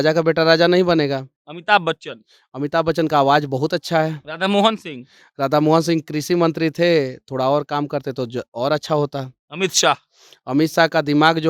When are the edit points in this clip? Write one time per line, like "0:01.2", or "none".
none